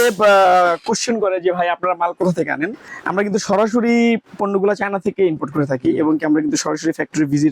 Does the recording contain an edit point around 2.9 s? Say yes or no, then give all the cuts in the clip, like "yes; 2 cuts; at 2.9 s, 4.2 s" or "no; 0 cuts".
yes; 1 cut; at 2.9 s